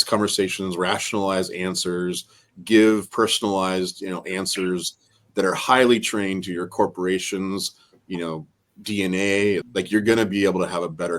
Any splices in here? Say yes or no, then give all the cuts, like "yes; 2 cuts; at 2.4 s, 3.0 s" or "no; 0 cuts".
yes; 1 cut; at 9.7 s